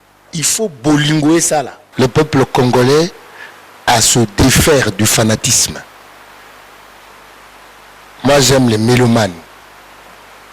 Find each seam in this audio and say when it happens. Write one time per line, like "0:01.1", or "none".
0:01.8